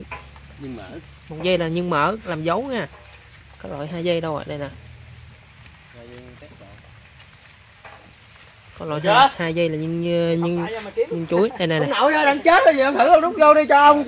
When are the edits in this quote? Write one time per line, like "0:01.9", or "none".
none